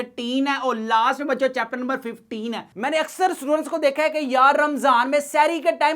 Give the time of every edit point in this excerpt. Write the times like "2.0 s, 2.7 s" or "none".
2.7 s